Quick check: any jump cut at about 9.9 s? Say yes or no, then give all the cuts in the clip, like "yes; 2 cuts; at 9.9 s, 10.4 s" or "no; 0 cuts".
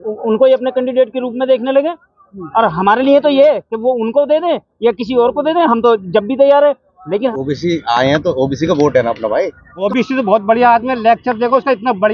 yes; 2 cuts; at 7.3 s, 9.9 s